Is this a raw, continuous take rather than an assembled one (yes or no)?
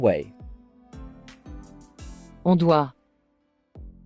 no